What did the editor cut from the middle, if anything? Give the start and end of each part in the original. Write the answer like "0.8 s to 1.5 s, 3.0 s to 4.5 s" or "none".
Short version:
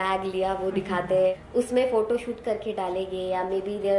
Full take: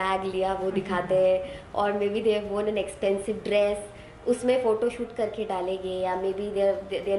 1.3 s to 4.0 s